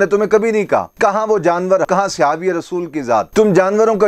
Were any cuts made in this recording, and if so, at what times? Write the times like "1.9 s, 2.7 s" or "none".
1.9 s, 3.3 s

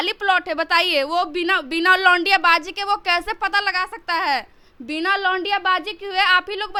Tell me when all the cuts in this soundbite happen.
none

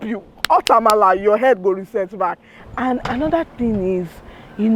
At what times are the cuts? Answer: 2.6 s

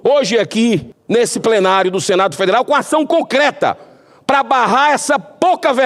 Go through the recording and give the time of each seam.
0.9 s

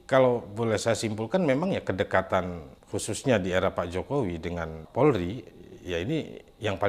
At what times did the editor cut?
4.8 s

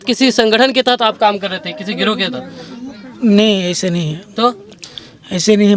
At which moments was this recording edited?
none

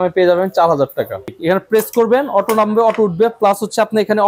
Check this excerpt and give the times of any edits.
1.3 s

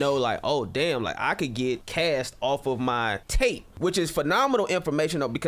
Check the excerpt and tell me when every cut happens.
1.9 s, 3.7 s

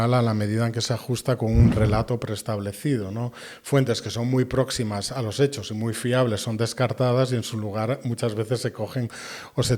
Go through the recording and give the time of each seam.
none

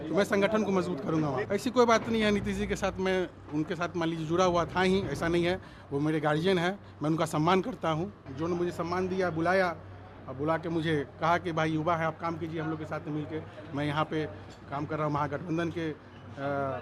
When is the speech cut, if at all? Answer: 1.5 s, 8.3 s

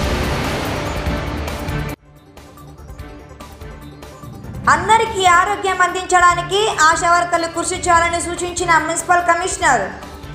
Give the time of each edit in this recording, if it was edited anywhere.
4.6 s

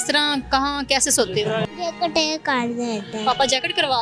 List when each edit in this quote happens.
1.7 s

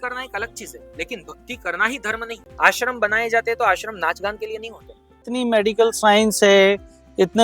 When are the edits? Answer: 2.4 s, 5.3 s

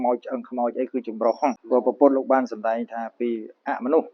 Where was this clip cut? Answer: 1.6 s

